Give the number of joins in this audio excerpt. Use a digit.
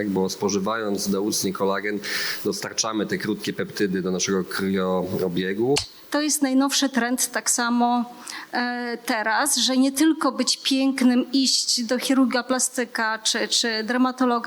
1